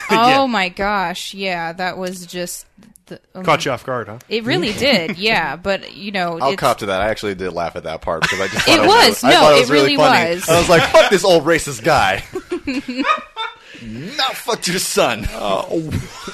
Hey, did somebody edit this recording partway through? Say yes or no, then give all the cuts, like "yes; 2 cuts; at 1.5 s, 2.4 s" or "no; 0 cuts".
no; 0 cuts